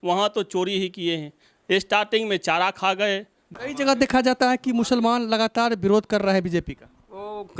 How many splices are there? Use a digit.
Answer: 1